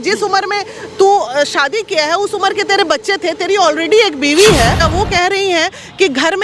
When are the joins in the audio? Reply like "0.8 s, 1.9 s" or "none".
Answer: 4.9 s